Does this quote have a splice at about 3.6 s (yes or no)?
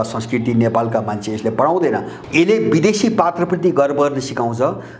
no